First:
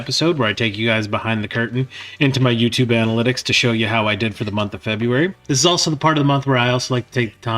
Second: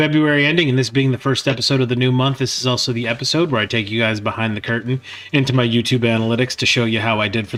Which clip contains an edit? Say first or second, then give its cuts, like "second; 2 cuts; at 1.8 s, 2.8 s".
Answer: first; 1 cut; at 5.4 s